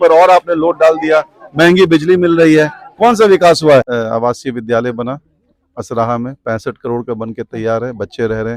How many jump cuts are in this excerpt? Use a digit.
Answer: 1